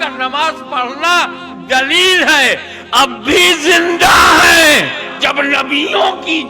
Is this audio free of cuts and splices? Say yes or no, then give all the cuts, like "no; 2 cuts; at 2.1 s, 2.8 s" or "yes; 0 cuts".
no; 1 cut; at 5.2 s